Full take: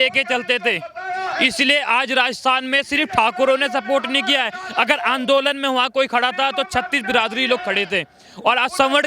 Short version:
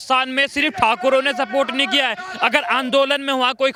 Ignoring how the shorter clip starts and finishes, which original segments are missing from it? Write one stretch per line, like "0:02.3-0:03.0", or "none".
none